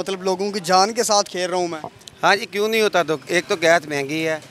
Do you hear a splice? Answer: no; 0 cuts

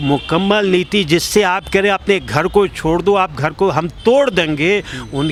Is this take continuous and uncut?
yes; 0 cuts

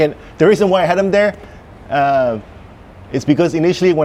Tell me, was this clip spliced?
no; 0 cuts

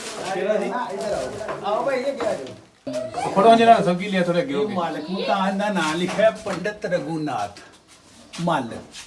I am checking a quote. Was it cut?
yes; 1 cut; at 2.9 s

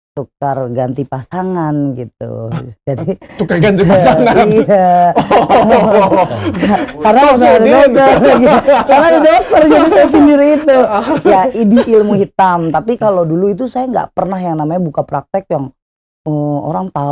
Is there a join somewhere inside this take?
no; 0 cuts

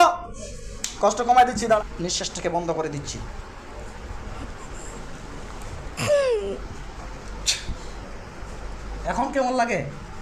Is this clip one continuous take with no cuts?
no; 1 cut; at 1.8 s

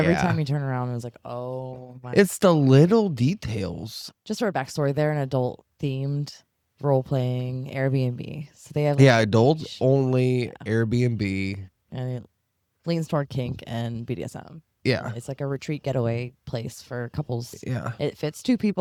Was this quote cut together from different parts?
no; 0 cuts

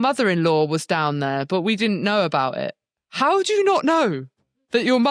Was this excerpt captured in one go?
yes; 0 cuts

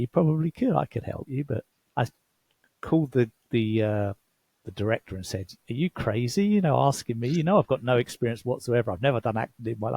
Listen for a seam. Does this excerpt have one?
yes; 1 cut; at 1.8 s

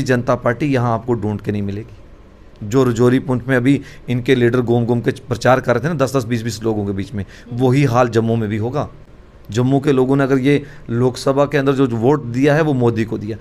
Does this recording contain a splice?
no; 0 cuts

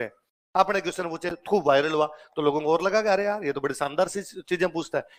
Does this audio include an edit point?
no; 0 cuts

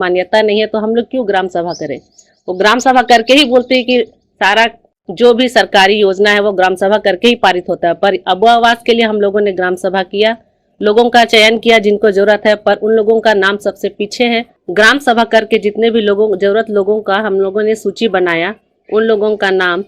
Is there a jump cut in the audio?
yes; 1 cut; at 14.6 s

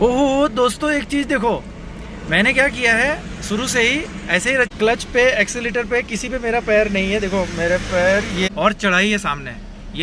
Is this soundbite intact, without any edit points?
no; 2 cuts; at 4.7 s, 8.5 s

